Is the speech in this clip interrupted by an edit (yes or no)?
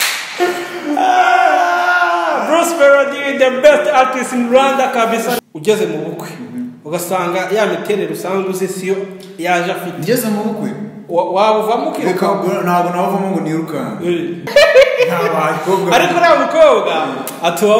yes